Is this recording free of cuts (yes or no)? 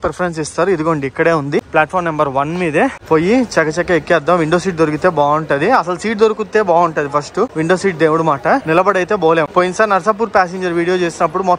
yes